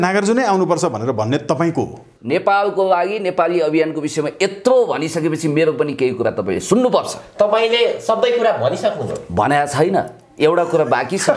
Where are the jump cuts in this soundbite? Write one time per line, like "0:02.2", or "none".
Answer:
0:02.1